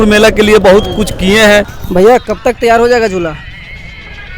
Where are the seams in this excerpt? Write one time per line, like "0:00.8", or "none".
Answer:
0:01.8